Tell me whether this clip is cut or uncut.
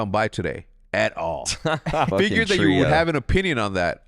cut